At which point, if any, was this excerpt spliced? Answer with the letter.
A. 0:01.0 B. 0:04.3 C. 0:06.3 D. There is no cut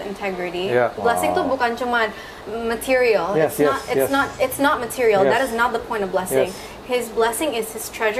A